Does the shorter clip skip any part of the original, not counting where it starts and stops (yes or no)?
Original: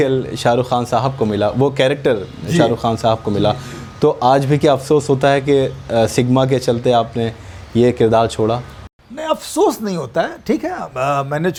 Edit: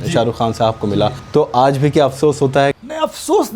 yes